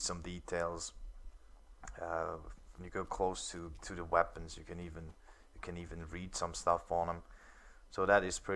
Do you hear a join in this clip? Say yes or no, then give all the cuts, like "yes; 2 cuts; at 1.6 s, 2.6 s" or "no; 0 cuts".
yes; 1 cut; at 6.5 s